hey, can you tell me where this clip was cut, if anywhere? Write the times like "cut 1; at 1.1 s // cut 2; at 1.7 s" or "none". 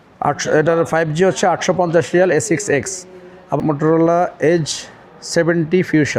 cut 1; at 3.6 s